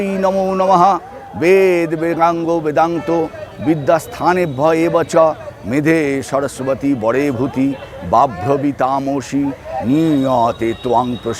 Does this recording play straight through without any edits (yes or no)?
yes